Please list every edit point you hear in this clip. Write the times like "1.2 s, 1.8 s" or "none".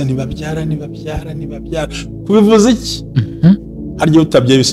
none